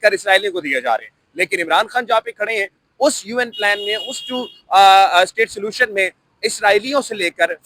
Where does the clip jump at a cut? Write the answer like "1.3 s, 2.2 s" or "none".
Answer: none